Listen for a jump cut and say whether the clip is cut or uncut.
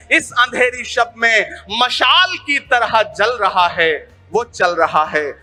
uncut